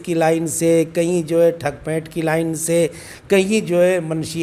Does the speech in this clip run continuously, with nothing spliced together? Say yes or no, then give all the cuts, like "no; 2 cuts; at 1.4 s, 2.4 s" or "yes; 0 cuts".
yes; 0 cuts